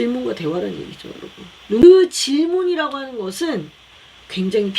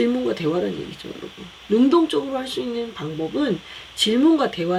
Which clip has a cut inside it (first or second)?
first